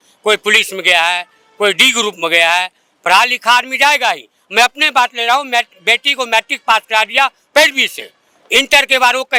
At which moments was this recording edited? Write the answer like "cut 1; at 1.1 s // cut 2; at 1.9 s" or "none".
none